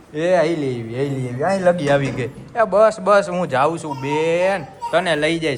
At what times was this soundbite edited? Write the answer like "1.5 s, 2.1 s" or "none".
none